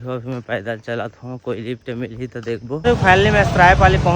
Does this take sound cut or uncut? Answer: cut